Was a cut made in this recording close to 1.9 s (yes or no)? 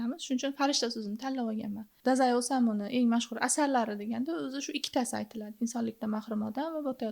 yes